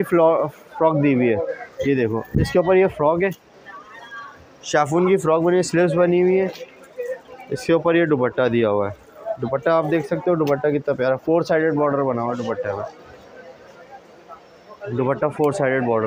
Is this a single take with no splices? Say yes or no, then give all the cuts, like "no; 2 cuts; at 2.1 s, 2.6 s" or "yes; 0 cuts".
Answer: yes; 0 cuts